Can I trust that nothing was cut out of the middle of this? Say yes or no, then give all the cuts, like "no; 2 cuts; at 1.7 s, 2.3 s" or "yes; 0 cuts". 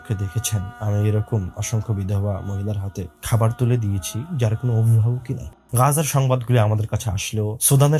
no; 1 cut; at 5.6 s